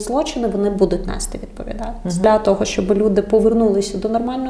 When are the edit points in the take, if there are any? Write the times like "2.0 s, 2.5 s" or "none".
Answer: 2.2 s